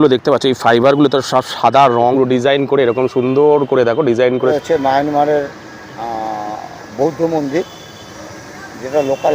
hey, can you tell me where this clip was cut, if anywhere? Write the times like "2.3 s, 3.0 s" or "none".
2.1 s, 4.5 s